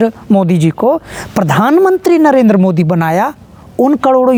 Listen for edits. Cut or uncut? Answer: uncut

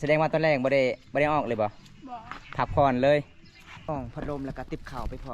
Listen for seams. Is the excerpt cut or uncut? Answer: cut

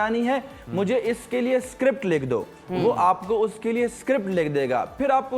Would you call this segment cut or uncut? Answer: uncut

